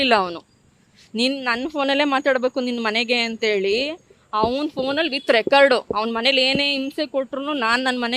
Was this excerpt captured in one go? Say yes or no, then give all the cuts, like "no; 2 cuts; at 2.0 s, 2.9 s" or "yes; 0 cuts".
yes; 0 cuts